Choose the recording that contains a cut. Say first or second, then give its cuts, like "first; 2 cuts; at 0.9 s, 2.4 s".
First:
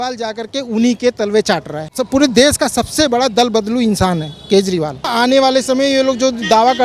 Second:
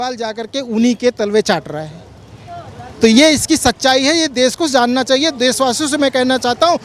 first; 2 cuts; at 2.0 s, 5.1 s